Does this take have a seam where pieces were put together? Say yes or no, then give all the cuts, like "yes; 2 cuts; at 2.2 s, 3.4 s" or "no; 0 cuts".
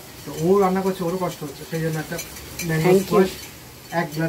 no; 0 cuts